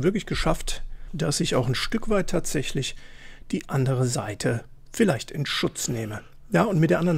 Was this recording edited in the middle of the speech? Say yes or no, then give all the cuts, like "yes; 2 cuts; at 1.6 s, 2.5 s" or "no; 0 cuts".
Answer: yes; 1 cut; at 1.1 s